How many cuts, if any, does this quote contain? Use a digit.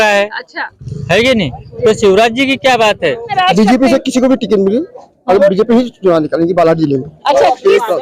1